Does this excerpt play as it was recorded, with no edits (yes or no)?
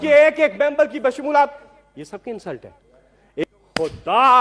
no